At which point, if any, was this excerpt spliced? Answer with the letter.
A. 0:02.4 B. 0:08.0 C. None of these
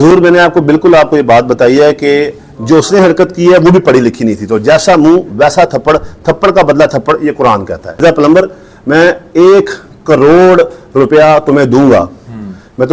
B